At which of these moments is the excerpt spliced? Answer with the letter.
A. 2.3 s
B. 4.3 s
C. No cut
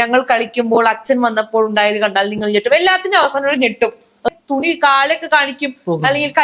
B